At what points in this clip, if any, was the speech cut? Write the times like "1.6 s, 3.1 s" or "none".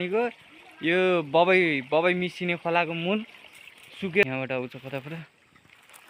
4.2 s